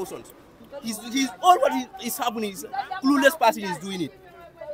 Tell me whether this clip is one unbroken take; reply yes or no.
yes